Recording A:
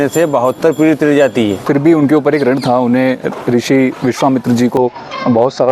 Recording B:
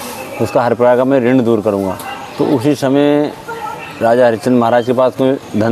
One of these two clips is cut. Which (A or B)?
A